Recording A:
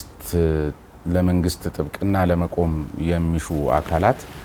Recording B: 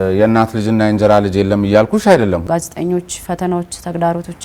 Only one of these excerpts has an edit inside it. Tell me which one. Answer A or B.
B